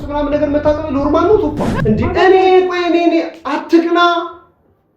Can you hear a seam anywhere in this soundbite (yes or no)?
yes